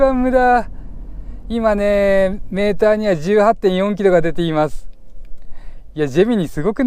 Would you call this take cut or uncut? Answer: uncut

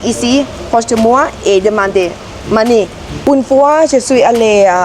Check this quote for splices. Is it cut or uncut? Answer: cut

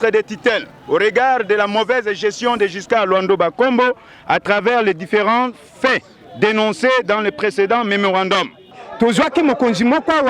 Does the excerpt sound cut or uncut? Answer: cut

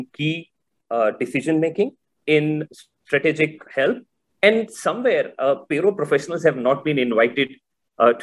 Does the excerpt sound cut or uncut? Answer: cut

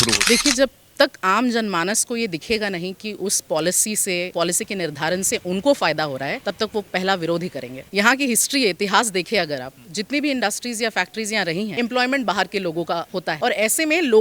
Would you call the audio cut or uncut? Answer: cut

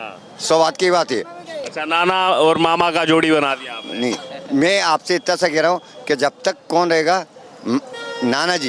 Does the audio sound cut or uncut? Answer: uncut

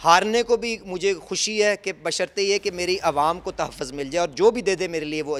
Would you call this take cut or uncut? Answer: uncut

